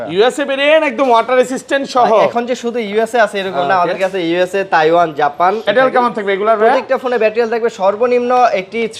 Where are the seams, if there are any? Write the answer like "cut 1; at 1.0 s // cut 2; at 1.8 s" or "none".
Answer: cut 1; at 5.7 s